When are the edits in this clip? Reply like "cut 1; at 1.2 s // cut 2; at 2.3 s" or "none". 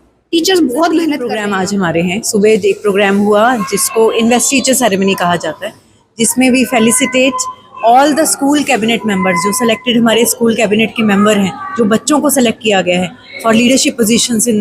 cut 1; at 1.4 s